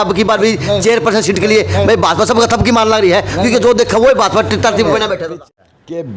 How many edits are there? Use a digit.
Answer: 1